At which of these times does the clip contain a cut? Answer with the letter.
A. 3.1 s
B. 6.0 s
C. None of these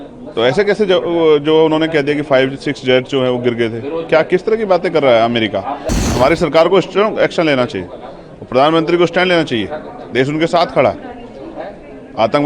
B